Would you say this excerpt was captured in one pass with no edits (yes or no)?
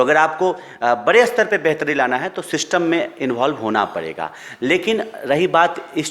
yes